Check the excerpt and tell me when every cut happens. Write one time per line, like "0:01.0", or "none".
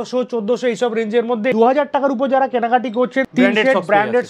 0:01.5
0:03.3